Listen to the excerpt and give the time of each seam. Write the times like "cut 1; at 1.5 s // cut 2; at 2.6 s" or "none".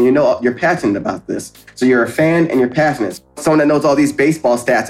cut 1; at 3.3 s

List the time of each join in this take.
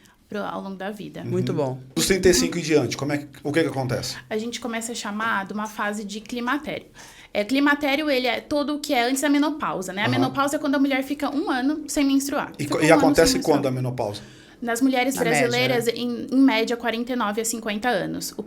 cut 1; at 1.9 s

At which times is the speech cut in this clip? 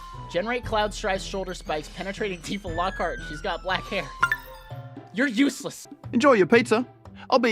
cut 1; at 5.9 s

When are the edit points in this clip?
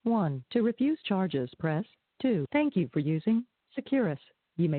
cut 1; at 2.5 s

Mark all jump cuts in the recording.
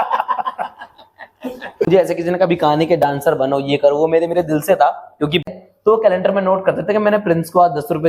cut 1; at 1.9 s // cut 2; at 5.4 s

